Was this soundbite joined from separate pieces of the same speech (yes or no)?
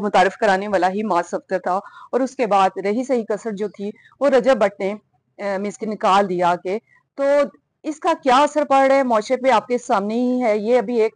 no